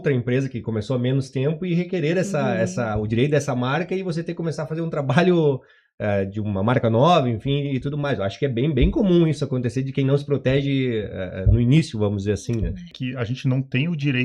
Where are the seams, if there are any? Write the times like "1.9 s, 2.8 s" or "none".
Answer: 12.9 s

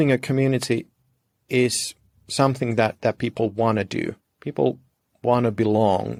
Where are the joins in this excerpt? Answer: none

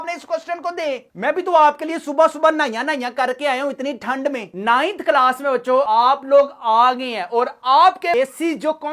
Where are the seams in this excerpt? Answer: 4.5 s, 5.9 s, 8.1 s

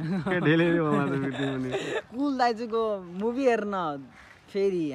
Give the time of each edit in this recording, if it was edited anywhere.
2.1 s

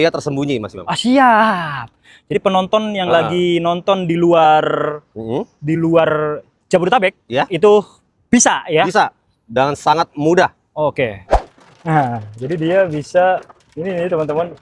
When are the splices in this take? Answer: 11.3 s

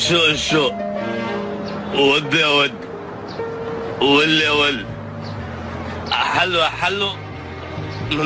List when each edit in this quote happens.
none

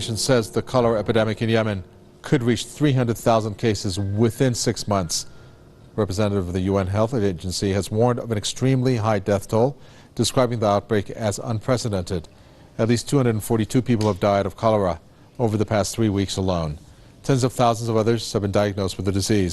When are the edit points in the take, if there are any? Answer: none

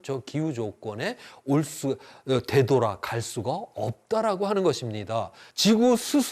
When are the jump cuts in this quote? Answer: 5.4 s

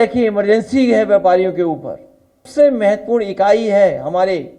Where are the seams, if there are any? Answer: 2.5 s

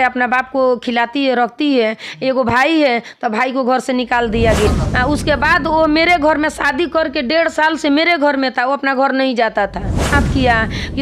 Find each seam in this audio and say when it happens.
4.7 s, 10.1 s

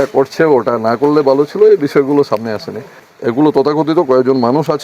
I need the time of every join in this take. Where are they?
3.1 s

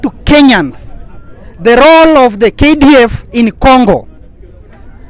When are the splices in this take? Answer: none

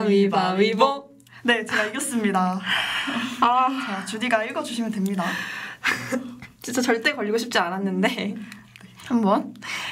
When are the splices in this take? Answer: none

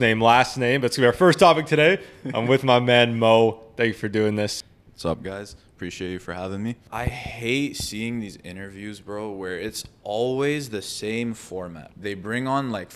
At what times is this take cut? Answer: 4.7 s, 6.8 s, 11.8 s

